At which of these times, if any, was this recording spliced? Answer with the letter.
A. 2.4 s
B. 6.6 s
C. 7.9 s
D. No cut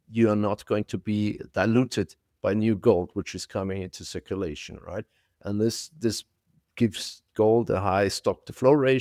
D